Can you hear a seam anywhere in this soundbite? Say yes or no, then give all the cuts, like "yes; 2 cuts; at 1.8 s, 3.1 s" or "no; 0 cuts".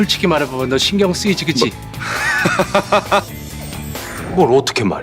yes; 1 cut; at 3.9 s